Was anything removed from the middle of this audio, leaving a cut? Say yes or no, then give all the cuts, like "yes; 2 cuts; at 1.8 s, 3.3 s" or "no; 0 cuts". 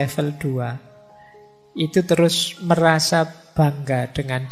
yes; 1 cut; at 3.4 s